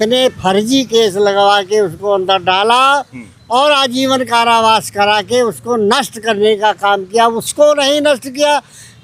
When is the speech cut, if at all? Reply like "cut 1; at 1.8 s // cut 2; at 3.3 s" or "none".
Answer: none

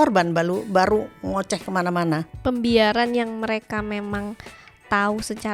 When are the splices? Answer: cut 1; at 2.3 s

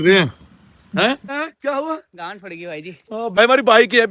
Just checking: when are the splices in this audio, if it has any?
cut 1; at 1.3 s // cut 2; at 3.4 s

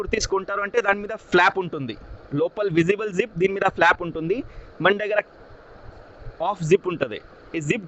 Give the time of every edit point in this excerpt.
none

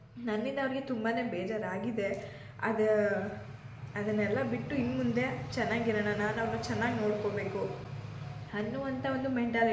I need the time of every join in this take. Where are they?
none

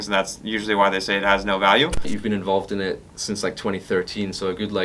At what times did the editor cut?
cut 1; at 2.1 s

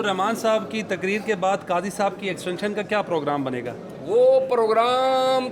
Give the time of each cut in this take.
none

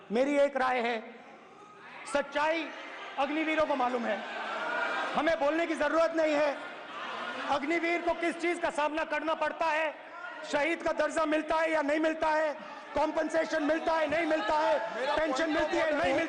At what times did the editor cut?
none

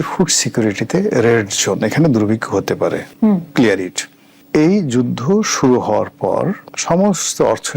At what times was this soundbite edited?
none

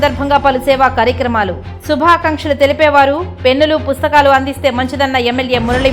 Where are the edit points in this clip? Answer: none

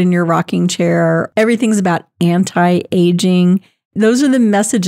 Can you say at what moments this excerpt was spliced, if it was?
cut 1; at 1.3 s

